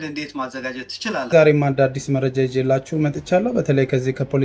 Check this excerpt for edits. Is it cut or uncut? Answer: cut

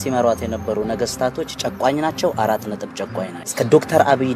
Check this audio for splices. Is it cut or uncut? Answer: cut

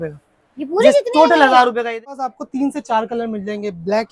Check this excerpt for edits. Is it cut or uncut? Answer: cut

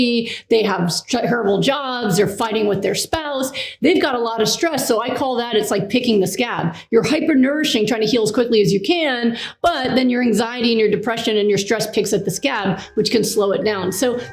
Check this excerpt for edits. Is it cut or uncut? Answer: uncut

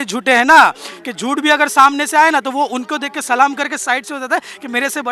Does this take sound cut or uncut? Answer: uncut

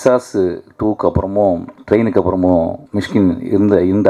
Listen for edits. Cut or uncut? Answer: uncut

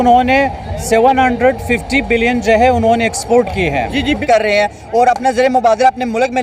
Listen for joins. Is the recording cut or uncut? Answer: cut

